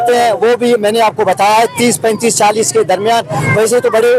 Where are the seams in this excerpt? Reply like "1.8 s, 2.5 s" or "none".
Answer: none